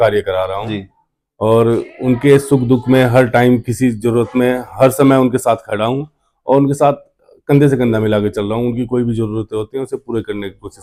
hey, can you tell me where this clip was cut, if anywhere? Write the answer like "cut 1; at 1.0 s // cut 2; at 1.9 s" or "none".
none

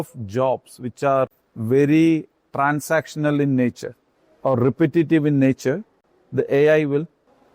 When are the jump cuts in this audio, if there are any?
cut 1; at 1.5 s

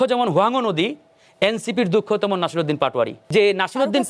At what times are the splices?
cut 1; at 3.2 s

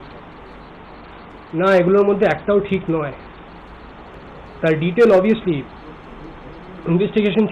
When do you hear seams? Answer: cut 1; at 4.1 s

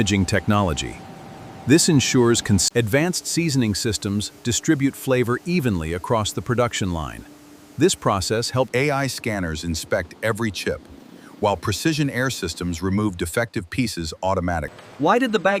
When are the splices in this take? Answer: cut 1; at 2.7 s // cut 2; at 8.7 s

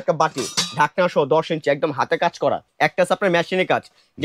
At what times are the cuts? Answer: cut 1; at 2.7 s

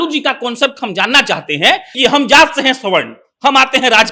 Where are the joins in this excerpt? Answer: cut 1; at 1.9 s

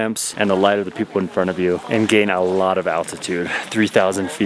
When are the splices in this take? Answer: none

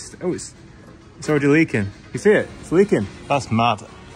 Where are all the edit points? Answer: cut 1; at 3.2 s

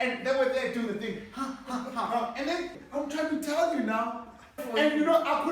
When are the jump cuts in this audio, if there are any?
cut 1; at 2.8 s // cut 2; at 4.6 s

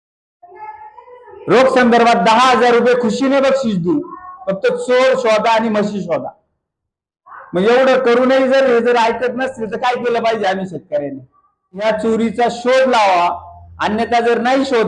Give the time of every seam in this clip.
cut 1; at 11.8 s

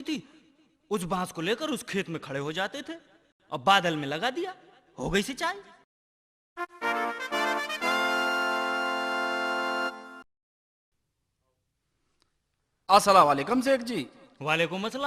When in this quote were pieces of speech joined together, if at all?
cut 1; at 6.2 s

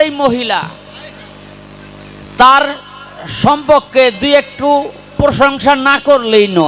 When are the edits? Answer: none

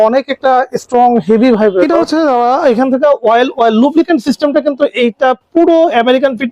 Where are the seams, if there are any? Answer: cut 1; at 1.9 s

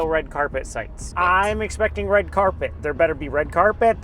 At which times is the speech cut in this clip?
cut 1; at 1.0 s

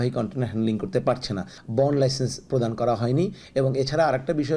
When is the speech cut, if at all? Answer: cut 1; at 1.5 s

